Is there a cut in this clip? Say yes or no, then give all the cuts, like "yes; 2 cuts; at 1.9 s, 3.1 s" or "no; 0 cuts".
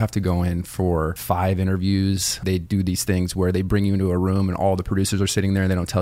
yes; 2 cuts; at 1.2 s, 2.4 s